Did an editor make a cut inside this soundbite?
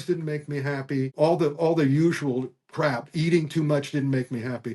yes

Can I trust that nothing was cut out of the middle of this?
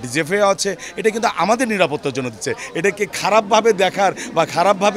yes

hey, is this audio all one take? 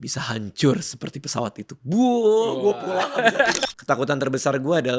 no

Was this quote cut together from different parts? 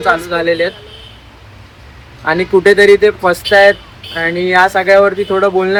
no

